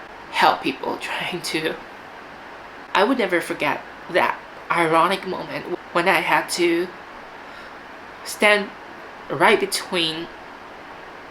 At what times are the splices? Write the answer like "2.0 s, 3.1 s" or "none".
2.8 s